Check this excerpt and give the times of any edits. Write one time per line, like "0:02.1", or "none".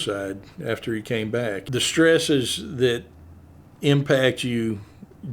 0:01.6